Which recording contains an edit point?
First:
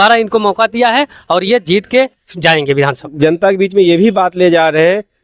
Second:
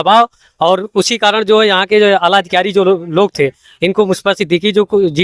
first; 1 cut; at 3.1 s

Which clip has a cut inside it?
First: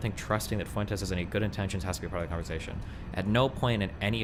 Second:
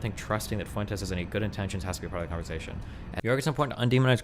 second; 1 cut; at 3.2 s

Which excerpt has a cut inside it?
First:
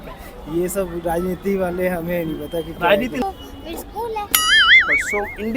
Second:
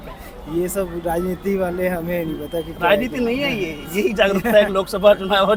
first; 1 cut; at 3.2 s

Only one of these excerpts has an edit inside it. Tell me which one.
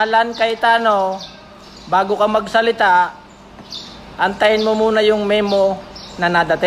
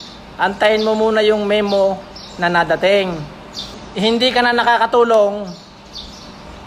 second; 1 cut; at 3.8 s

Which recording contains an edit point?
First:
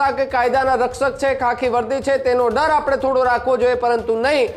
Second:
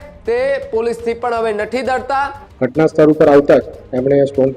second; 1 cut; at 2.4 s

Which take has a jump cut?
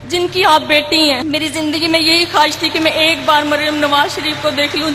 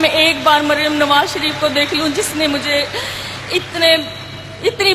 first; 1 cut; at 1.2 s

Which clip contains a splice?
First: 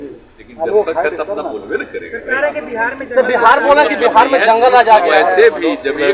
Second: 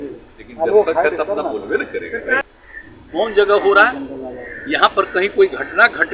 second; 1 cut; at 2.4 s

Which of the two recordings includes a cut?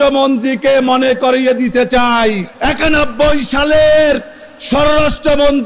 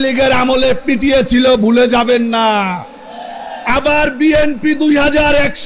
first; 1 cut; at 2.5 s

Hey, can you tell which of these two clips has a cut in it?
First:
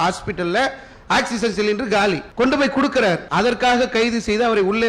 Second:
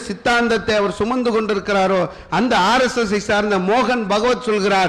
first; 2 cuts; at 2.2 s, 3.2 s

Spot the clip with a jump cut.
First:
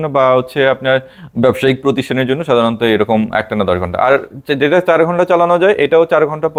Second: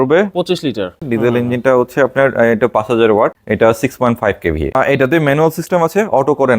second; 3 cuts; at 1.0 s, 3.4 s, 4.7 s

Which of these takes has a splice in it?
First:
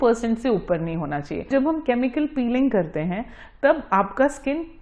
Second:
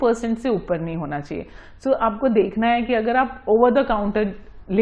first; 1 cut; at 1.5 s

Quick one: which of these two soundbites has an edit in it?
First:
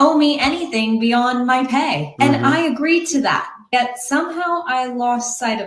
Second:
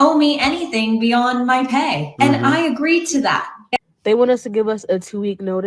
second; 1 cut; at 3.8 s

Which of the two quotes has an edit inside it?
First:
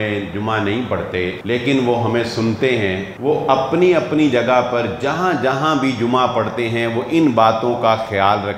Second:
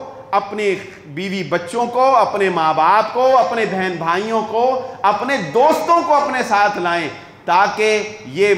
first; 2 cuts; at 1.4 s, 3.1 s

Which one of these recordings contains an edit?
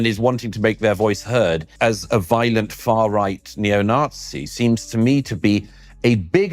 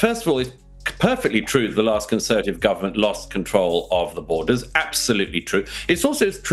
first; 1 cut; at 1.7 s

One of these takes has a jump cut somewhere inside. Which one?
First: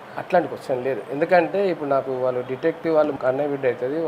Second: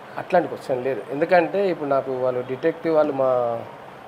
first; 1 cut; at 3.1 s

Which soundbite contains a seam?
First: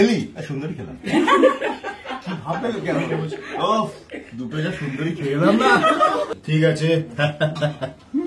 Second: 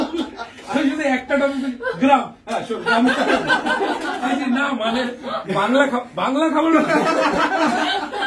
first; 1 cut; at 6.4 s

